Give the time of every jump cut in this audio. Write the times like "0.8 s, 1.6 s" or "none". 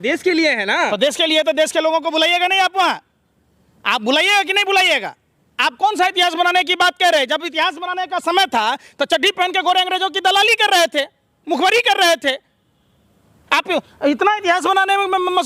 none